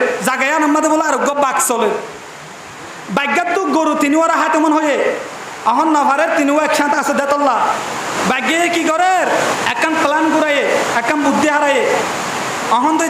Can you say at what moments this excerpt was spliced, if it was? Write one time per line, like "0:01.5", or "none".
0:08.1
0:09.6